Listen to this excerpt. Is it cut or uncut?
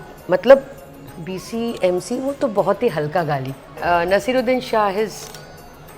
cut